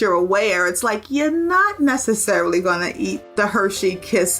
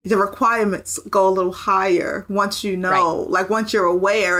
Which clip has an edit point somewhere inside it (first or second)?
first